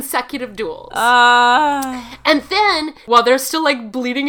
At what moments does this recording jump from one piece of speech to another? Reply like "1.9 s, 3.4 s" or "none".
3.0 s